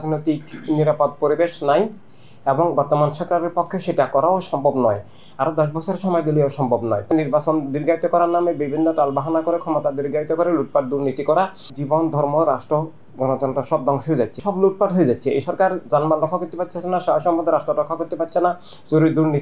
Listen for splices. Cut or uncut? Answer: cut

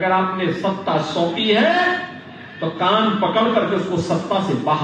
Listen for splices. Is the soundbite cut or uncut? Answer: uncut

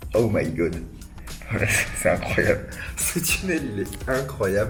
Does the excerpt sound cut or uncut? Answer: uncut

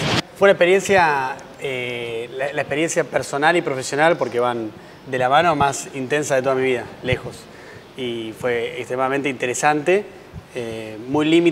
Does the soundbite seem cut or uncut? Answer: uncut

